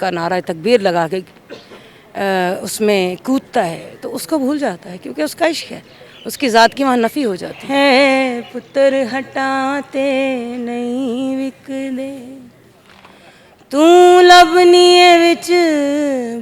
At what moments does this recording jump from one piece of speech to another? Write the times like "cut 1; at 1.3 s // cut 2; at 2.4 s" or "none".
cut 1; at 7.5 s